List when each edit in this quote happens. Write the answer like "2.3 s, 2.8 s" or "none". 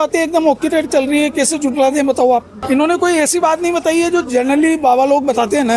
2.5 s